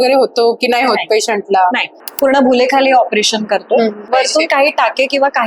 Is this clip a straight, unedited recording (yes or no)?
no